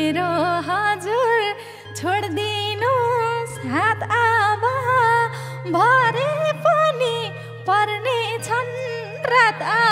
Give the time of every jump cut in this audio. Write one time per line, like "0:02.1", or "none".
none